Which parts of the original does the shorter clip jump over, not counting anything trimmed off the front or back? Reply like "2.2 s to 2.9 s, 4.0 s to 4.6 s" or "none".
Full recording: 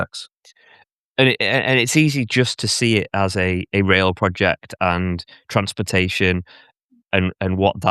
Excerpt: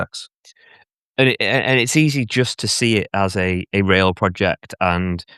none